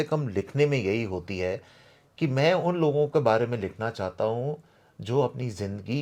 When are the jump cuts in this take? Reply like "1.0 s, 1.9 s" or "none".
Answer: none